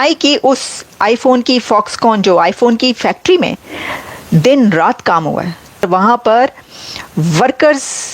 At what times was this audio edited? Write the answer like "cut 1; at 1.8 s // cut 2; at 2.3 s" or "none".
cut 1; at 5.8 s